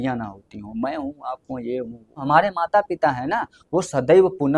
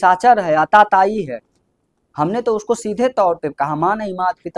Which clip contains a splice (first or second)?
first